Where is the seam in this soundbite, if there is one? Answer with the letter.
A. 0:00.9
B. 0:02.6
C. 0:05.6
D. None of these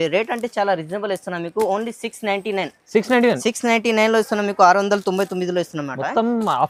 D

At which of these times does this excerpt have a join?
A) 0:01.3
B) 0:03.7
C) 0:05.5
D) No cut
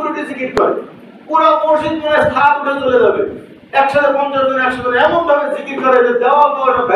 D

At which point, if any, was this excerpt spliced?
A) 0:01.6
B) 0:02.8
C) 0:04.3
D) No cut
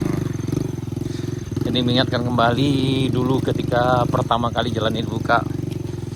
D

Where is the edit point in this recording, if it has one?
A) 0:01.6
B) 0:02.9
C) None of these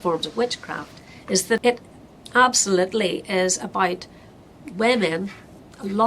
A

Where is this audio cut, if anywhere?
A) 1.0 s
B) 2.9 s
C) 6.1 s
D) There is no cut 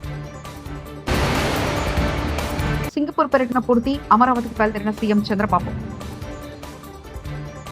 A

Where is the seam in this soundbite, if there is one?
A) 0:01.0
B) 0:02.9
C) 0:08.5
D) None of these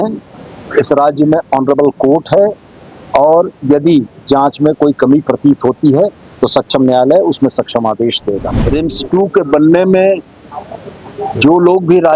C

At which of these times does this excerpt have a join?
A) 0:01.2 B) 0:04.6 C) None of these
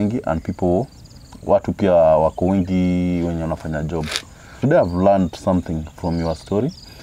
B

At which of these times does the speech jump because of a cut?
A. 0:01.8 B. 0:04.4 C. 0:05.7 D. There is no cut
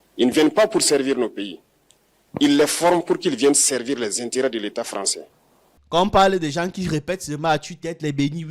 C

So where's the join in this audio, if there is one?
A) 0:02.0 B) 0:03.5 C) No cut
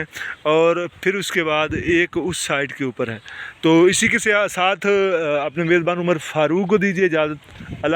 C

